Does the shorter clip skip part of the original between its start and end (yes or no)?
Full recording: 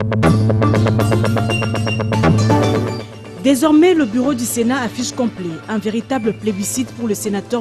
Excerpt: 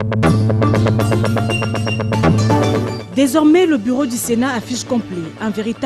yes